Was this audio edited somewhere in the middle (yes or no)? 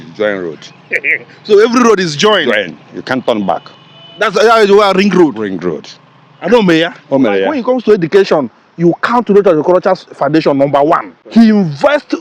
yes